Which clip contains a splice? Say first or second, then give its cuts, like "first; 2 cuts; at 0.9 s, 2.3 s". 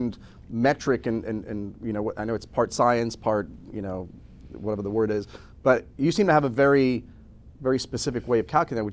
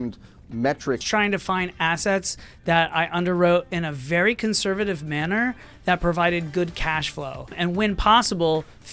second; 2 cuts; at 1.0 s, 7.5 s